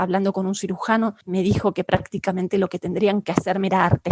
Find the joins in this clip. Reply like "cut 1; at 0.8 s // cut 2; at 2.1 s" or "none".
cut 1; at 1.2 s